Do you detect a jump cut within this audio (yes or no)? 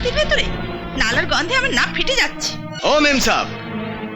yes